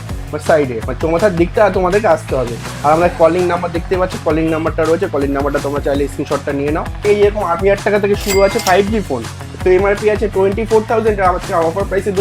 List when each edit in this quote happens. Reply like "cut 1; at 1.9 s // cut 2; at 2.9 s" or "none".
cut 1; at 7.0 s // cut 2; at 9.4 s